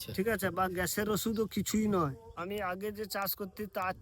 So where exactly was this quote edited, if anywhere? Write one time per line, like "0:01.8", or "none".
0:02.3

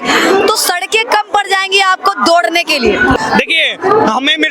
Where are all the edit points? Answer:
0:03.2

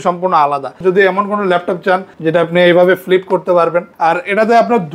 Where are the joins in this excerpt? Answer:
0:00.8
0:02.1
0:03.9

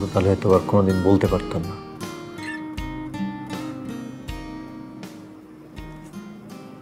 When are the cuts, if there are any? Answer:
none

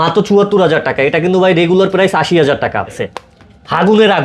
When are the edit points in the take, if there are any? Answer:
0:03.0

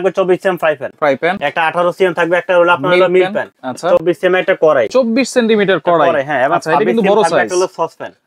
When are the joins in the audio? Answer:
none

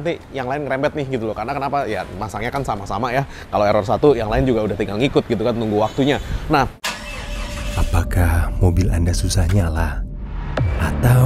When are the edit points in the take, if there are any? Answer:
none

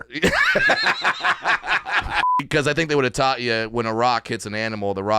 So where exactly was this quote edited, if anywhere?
0:02.5

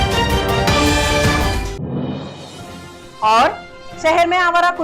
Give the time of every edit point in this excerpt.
0:02.4

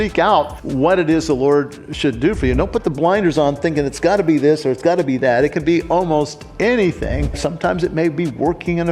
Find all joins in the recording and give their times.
0:07.4

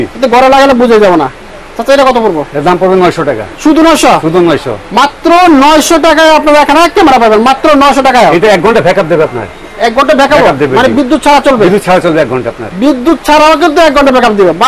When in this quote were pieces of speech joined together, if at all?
none

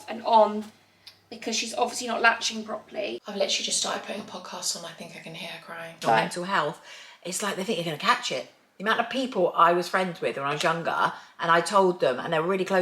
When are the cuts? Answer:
0:03.3
0:06.0

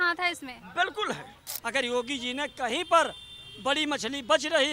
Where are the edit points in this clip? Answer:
0:01.5

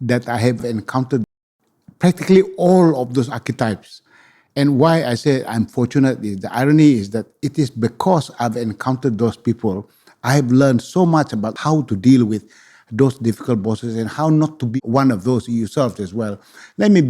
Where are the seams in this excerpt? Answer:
0:11.5
0:14.6

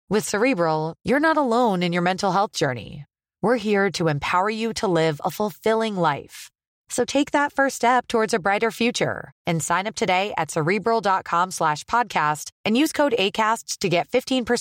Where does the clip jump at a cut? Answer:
none

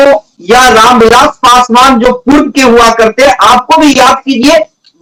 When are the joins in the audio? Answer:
none

